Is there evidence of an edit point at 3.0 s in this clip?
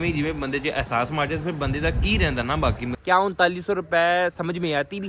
yes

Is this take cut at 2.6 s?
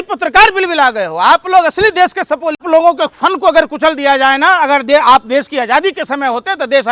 yes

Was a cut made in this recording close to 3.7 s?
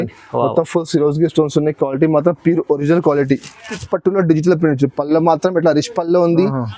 yes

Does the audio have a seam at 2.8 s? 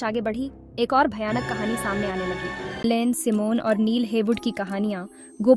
yes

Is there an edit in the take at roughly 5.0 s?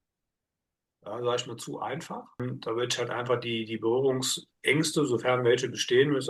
no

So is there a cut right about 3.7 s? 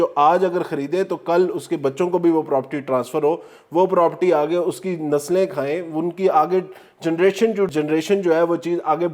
no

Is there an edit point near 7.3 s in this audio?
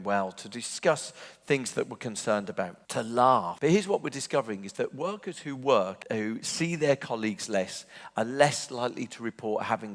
no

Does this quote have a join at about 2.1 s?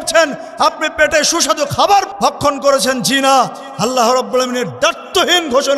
yes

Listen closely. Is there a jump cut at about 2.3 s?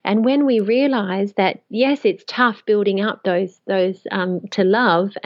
no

